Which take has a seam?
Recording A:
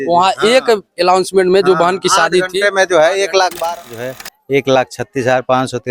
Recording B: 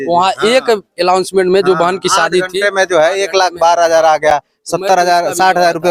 A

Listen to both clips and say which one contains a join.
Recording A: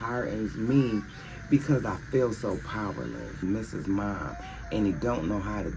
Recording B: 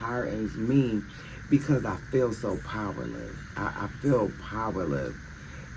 A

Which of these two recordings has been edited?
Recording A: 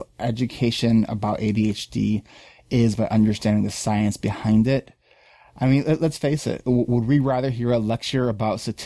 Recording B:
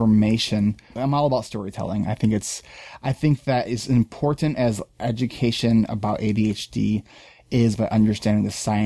B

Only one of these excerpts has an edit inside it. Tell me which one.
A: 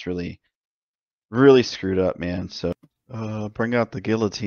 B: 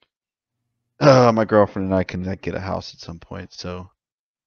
A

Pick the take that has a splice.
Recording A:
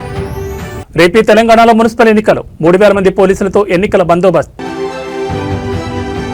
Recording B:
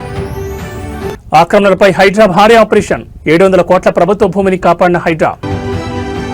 B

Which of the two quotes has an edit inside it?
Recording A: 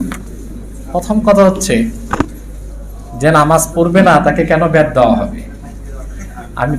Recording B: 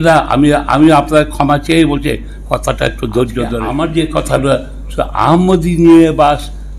B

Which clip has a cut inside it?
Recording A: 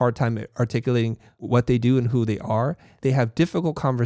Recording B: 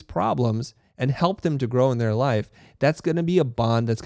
A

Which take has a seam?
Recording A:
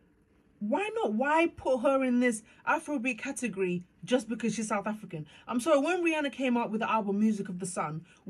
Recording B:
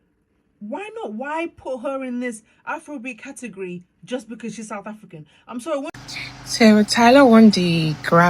B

